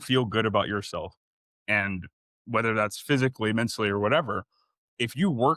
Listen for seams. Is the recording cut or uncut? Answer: uncut